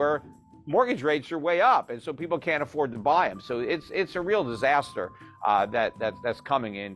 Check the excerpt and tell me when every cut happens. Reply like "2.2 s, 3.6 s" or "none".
none